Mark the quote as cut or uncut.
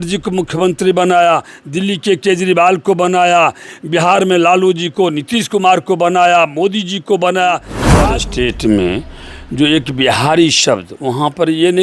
cut